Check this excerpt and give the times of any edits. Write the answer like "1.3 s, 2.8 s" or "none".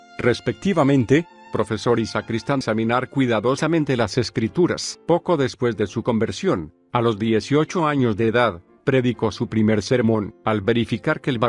none